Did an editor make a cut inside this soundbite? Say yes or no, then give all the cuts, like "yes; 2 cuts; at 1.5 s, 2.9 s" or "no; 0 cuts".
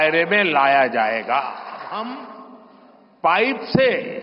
yes; 1 cut; at 1.9 s